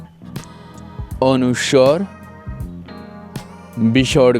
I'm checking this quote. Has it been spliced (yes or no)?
yes